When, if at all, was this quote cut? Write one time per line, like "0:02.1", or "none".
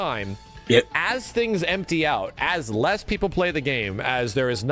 none